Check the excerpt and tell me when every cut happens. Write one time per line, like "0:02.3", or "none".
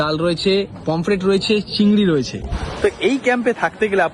0:02.6